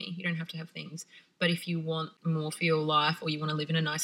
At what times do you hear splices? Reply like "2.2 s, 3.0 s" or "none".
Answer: 2.1 s